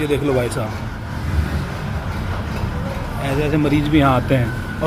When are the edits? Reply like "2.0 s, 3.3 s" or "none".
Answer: none